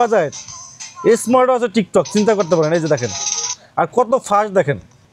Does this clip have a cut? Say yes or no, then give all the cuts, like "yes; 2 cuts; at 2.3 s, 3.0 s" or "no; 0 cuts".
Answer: no; 0 cuts